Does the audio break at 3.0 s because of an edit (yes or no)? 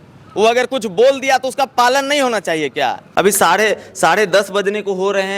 yes